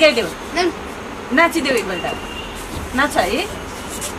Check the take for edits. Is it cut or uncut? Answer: uncut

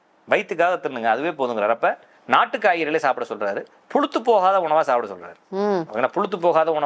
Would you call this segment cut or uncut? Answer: cut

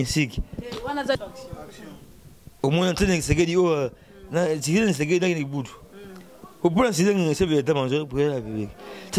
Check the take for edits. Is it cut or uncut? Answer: cut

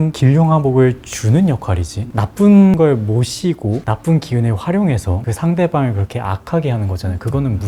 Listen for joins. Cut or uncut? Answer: uncut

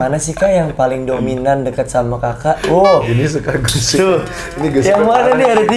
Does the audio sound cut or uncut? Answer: uncut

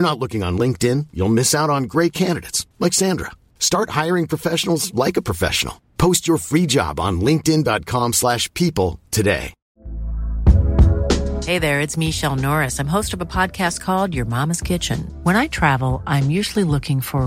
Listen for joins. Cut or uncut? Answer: uncut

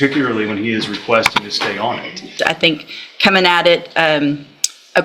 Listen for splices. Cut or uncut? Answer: cut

